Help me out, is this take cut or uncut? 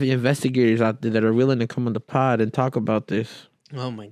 uncut